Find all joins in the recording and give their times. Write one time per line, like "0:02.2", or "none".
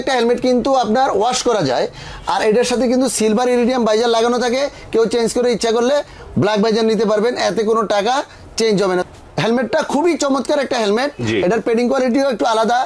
0:09.0